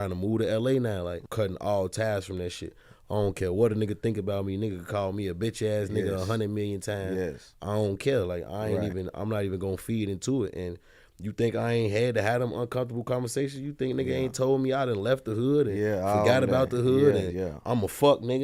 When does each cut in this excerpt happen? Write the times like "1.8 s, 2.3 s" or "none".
1.2 s

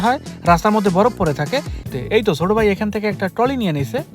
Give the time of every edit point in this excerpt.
1.8 s

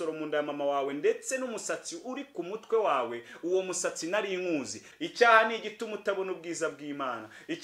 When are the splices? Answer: 4.8 s

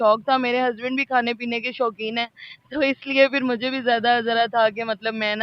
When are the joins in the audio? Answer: none

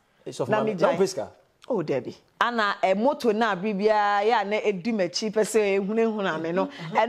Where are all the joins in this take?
2.2 s

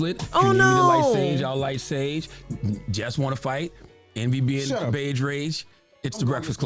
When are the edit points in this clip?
none

